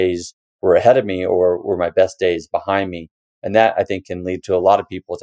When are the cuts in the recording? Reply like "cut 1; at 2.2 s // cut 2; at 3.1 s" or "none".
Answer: none